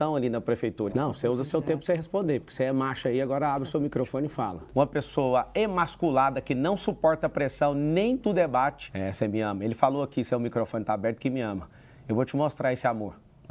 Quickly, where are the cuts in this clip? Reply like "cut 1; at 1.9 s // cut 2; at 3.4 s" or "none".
cut 1; at 0.9 s // cut 2; at 4.6 s // cut 3; at 8.9 s